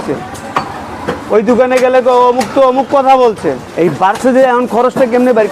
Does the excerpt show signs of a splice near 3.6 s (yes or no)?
yes